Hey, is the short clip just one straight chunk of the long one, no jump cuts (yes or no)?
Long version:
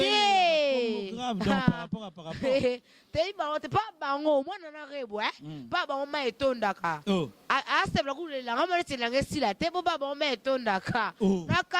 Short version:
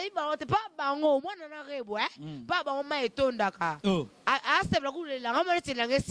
yes